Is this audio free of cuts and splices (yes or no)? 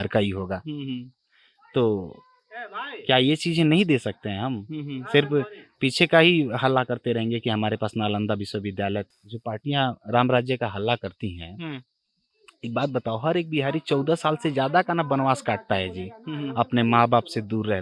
no